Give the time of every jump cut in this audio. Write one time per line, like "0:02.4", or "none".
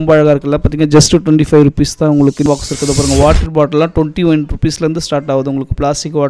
0:02.4